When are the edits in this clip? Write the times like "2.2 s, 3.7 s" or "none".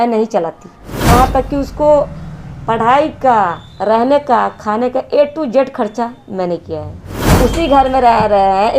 0.9 s, 7.3 s